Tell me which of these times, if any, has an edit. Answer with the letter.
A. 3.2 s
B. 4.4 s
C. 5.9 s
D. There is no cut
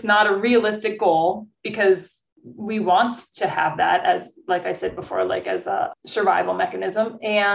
C